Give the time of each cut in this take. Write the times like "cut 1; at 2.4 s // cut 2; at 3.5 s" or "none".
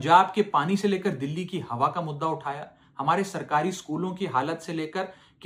none